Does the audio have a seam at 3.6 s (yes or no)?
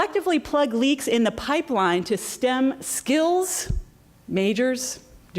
no